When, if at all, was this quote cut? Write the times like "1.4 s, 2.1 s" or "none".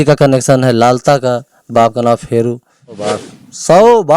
3.2 s